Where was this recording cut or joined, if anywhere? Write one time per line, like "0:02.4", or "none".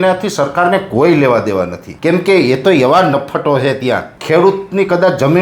0:01.9
0:04.1